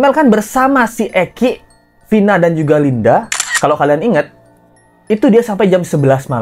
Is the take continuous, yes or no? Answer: yes